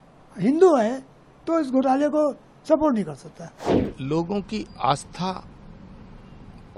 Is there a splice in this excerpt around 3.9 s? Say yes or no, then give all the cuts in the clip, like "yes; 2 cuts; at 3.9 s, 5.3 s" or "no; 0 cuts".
yes; 1 cut; at 3.9 s